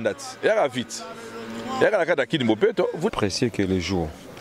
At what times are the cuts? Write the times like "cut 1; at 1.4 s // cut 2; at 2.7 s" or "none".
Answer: cut 1; at 3.1 s